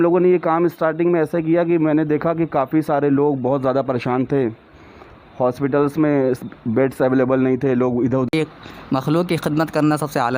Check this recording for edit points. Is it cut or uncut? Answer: cut